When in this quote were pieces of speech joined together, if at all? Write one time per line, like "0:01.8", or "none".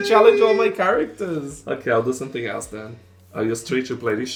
none